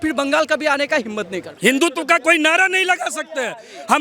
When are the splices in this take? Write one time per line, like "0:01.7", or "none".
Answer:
0:01.4